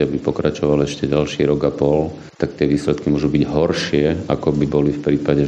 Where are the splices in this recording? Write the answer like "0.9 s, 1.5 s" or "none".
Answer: none